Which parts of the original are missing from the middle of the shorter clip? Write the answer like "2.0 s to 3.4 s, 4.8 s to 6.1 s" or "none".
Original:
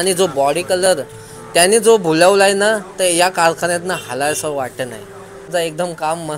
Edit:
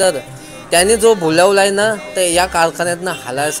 none